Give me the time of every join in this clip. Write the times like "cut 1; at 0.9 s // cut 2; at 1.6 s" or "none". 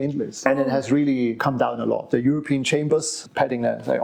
cut 1; at 2.0 s // cut 2; at 3.2 s